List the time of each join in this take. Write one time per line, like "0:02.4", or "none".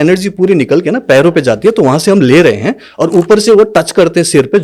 none